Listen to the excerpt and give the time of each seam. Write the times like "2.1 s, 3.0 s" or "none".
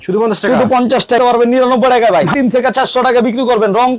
1.2 s, 2.3 s